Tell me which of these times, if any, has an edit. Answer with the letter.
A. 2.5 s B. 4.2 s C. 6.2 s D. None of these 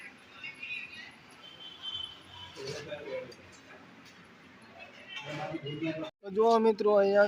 C